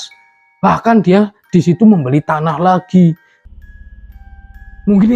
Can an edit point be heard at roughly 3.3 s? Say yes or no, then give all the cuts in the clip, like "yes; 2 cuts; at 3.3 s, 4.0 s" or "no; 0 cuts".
yes; 1 cut; at 3.3 s